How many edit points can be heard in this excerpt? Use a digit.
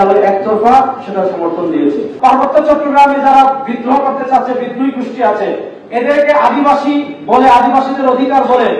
1